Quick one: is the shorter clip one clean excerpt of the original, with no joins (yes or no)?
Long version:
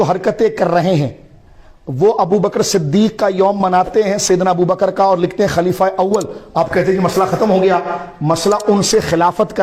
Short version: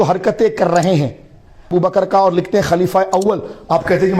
no